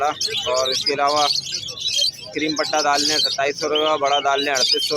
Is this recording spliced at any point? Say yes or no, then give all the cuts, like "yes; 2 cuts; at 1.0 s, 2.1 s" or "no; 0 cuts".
no; 0 cuts